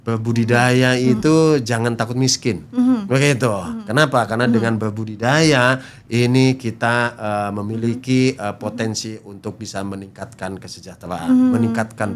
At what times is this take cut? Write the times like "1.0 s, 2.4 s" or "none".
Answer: none